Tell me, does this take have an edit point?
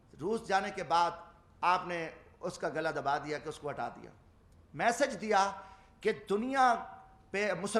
no; 0 cuts

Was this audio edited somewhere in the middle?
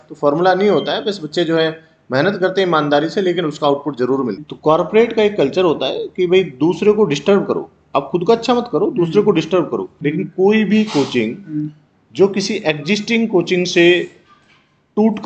yes; 2 cuts; at 4.4 s, 10.0 s

